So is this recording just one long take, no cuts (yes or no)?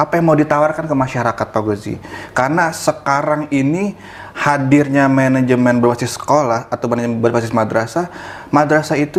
yes